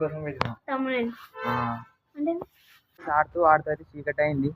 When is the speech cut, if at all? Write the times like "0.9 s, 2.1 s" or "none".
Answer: 3.0 s

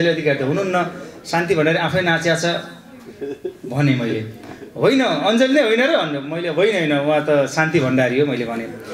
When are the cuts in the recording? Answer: none

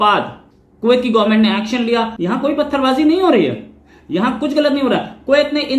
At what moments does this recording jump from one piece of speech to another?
2.1 s

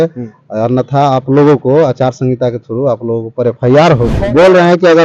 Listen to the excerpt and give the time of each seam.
4.1 s

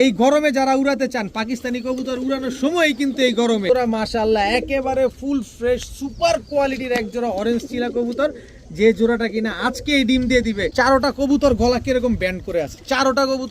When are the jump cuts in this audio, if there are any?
3.7 s, 10.7 s

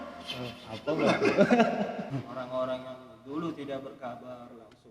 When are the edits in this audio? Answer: 2.1 s

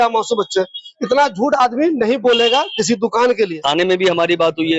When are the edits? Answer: 3.4 s

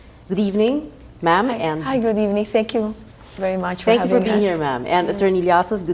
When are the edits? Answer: 3.3 s

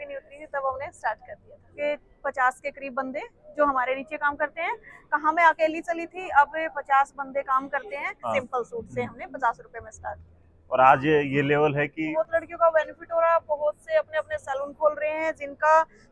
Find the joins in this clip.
1.8 s, 8.1 s, 12.1 s

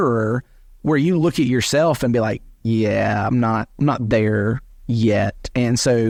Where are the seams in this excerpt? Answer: none

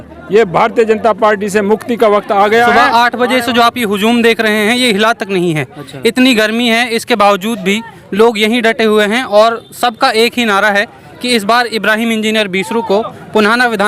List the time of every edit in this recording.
2.7 s

